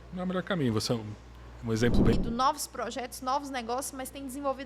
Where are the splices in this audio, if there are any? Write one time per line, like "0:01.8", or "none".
0:02.1

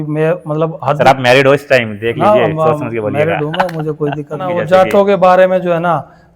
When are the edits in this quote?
0:04.6

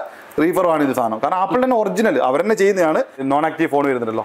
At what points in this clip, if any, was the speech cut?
0:03.2

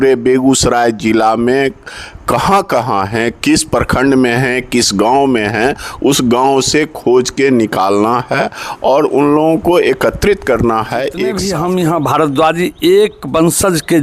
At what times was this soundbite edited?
0:11.4

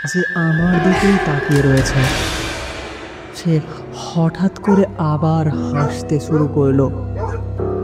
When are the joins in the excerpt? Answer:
none

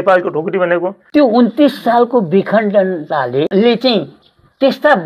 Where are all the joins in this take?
0:01.0
0:03.5

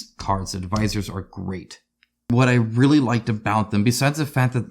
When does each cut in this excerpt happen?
0:02.3

